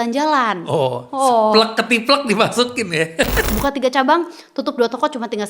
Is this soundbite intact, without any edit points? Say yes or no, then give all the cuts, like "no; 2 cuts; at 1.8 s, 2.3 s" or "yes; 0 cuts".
no; 1 cut; at 3.5 s